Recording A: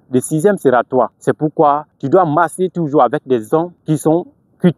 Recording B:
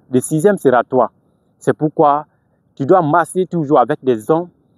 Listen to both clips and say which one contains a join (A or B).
A